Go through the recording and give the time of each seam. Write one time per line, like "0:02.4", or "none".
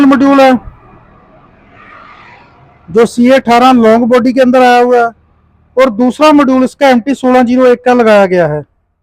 none